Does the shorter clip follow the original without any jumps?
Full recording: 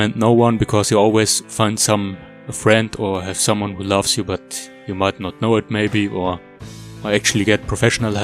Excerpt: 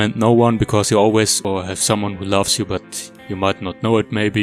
no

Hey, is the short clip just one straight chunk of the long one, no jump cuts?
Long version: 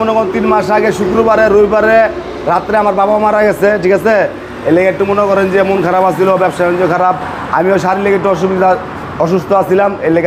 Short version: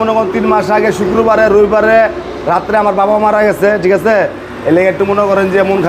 yes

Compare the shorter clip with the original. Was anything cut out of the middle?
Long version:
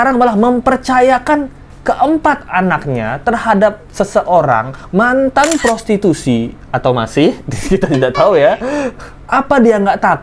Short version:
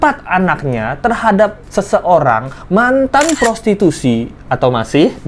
no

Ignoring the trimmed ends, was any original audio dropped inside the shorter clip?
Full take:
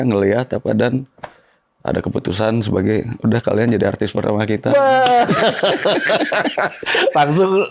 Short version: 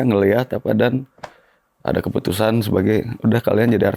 no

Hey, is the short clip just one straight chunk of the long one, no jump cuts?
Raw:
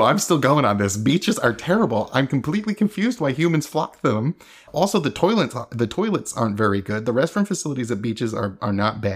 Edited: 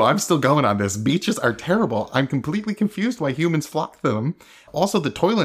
yes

